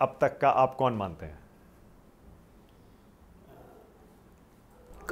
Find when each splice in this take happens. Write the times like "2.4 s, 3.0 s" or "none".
none